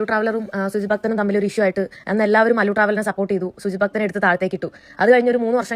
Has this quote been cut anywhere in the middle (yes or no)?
no